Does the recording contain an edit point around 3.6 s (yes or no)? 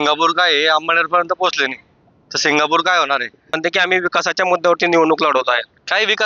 yes